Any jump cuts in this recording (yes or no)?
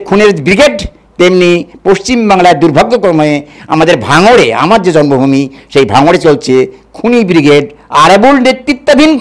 no